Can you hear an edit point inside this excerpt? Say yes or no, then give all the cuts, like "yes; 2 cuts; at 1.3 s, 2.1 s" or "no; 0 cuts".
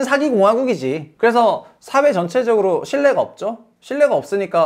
yes; 1 cut; at 1.1 s